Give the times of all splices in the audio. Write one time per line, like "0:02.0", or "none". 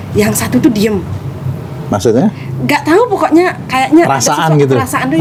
none